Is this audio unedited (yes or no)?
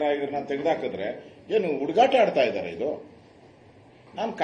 yes